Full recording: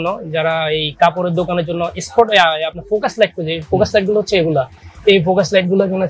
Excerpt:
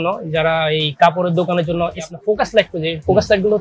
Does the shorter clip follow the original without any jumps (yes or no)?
no